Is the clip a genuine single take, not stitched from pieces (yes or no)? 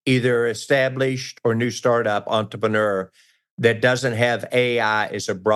yes